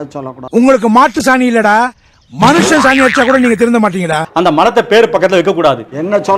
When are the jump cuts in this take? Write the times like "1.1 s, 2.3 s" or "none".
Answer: 4.2 s